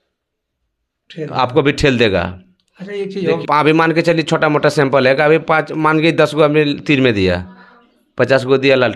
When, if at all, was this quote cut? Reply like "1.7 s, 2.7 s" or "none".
none